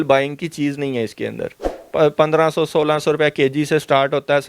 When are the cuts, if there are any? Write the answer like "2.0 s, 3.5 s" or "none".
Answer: 1.6 s